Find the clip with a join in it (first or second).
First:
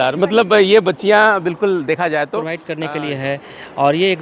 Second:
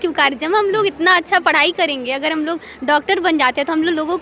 first